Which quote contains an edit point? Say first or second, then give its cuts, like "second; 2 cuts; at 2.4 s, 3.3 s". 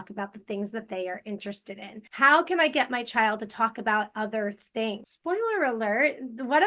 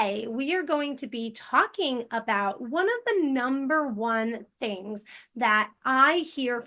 first; 2 cuts; at 2.0 s, 5.1 s